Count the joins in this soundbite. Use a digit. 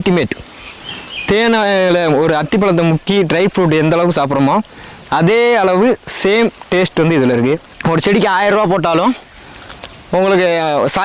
1